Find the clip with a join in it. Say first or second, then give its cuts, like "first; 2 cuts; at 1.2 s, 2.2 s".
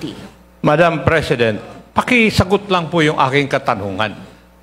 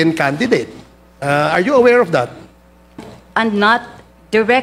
second; 1 cut; at 3.2 s